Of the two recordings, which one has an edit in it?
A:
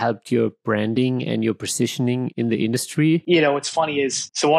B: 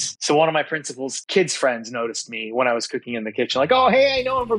A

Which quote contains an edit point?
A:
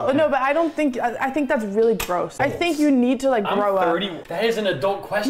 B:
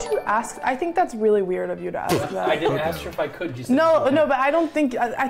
A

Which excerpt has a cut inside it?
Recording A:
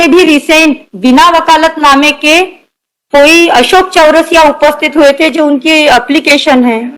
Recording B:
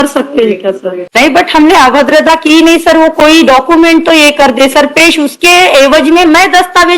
B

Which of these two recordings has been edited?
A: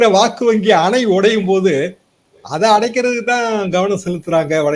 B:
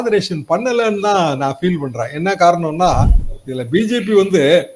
B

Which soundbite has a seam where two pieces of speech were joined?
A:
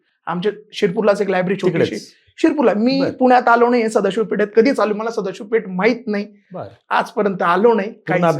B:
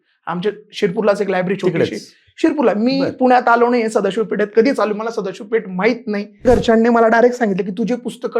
B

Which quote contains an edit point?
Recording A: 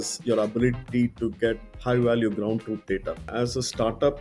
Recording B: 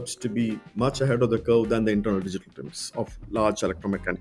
A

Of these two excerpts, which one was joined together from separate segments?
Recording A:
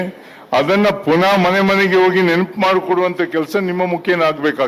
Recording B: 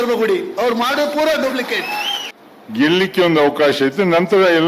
B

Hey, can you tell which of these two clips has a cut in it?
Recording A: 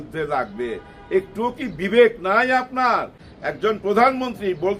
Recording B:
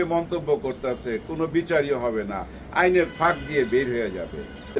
A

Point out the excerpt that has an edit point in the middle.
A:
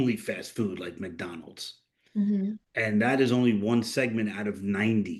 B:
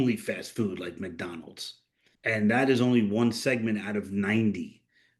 B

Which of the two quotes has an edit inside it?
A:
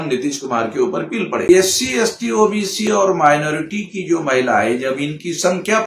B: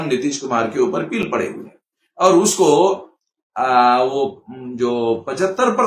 A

